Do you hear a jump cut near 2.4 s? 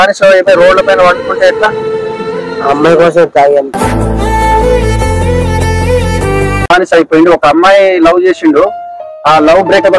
no; 1 cut; at 6.7 s

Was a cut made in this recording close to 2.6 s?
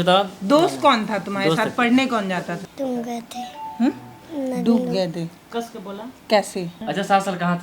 yes; 2 cuts; at 2.6 s, 6.7 s

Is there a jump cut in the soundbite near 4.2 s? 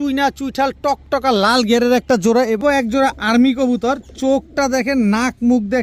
no; 1 cut; at 2.6 s

